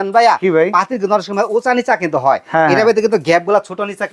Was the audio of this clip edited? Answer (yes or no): no